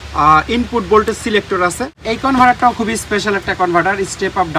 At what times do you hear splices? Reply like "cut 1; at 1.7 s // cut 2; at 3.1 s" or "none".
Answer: cut 1; at 2.0 s